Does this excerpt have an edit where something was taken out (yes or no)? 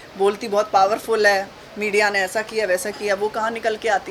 no